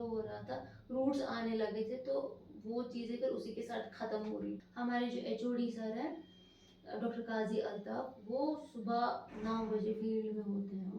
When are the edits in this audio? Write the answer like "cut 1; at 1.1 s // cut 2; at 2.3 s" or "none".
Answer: cut 1; at 4.7 s

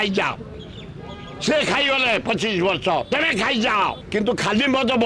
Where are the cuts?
cut 1; at 4.0 s

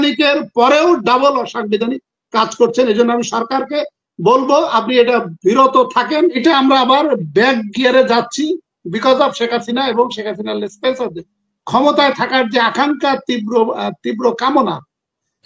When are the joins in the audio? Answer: cut 1; at 6.4 s

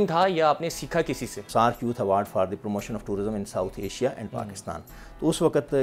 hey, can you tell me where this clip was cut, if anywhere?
cut 1; at 1.3 s

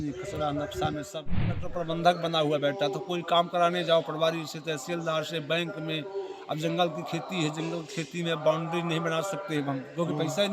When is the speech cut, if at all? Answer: cut 1; at 1.6 s

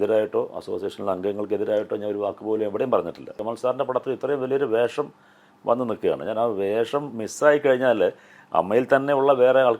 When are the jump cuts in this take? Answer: cut 1; at 3.4 s

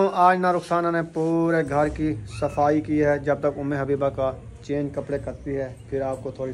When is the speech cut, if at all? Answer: none

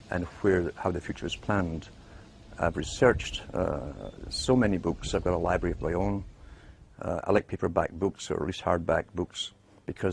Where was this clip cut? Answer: cut 1; at 5.8 s

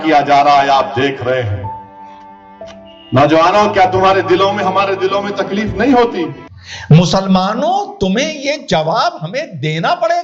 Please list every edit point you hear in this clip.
cut 1; at 6.4 s

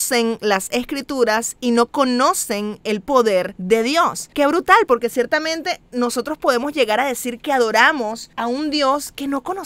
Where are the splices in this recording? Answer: none

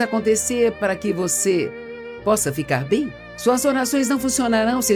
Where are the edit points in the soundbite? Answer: none

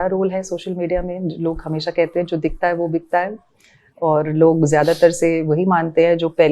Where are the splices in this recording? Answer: none

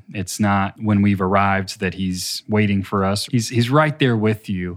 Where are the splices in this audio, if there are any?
cut 1; at 0.8 s // cut 2; at 2.3 s // cut 3; at 3.2 s

